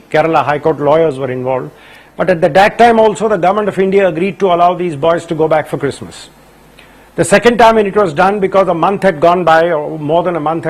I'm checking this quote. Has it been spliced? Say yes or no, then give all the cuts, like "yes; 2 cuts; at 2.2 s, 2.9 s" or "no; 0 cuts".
yes; 1 cut; at 5.7 s